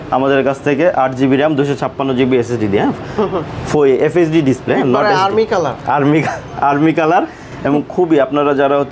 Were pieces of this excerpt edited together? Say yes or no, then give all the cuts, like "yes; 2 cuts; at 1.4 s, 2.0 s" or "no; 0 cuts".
no; 0 cuts